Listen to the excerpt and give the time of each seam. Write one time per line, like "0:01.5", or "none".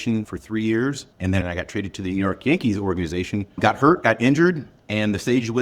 0:01.1
0:03.6